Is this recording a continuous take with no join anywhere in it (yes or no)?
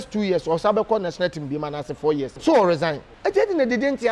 no